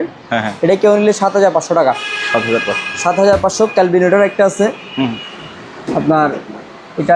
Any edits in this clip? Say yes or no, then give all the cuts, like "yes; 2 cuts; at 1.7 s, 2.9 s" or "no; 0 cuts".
no; 0 cuts